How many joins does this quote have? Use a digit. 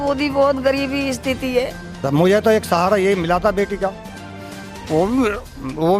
1